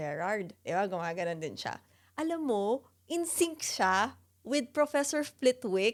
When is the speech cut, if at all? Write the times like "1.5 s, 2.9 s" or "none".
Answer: none